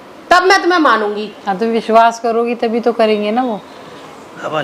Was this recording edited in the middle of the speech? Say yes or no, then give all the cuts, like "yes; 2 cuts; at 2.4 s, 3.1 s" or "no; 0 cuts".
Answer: yes; 1 cut; at 3.7 s